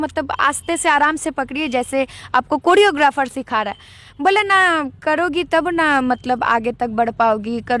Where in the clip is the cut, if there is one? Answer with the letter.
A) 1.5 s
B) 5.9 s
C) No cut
C